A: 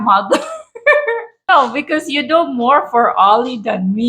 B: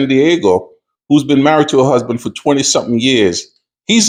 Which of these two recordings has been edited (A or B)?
A